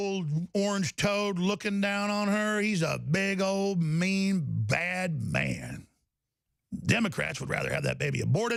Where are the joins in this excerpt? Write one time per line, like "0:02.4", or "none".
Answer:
none